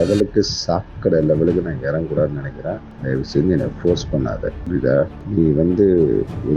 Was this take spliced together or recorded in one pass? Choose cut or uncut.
cut